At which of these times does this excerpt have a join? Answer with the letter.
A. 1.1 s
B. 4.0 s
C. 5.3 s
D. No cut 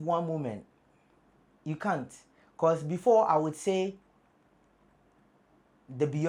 D